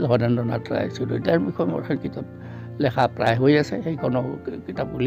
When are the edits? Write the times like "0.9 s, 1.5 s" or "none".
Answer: none